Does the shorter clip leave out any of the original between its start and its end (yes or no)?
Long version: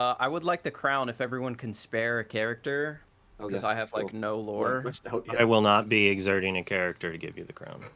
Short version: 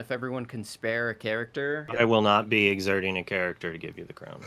yes